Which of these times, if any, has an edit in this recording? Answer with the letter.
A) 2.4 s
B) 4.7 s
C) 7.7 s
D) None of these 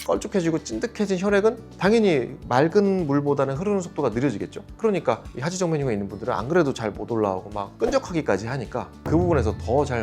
C